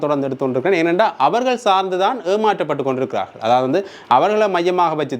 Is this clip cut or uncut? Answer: uncut